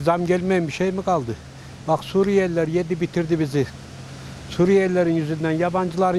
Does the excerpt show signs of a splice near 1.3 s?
no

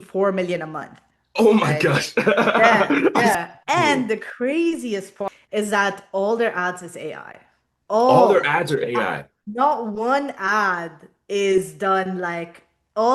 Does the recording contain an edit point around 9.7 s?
no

